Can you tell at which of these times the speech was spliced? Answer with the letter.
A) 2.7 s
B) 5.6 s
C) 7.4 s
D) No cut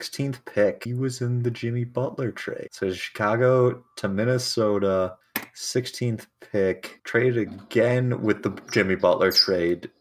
A